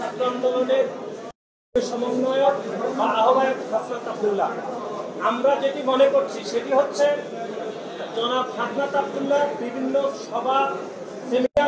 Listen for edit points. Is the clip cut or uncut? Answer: uncut